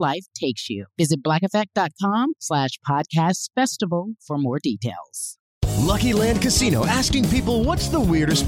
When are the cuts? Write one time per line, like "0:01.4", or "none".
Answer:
0:05.3